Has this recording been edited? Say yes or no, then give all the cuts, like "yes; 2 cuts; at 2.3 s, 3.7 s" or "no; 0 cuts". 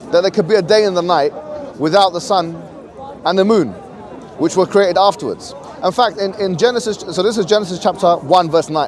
no; 0 cuts